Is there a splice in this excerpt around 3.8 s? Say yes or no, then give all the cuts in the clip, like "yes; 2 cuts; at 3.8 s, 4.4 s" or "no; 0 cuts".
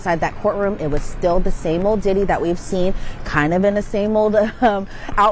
no; 0 cuts